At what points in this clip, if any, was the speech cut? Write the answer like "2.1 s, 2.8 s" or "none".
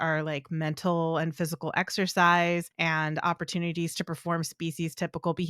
2.7 s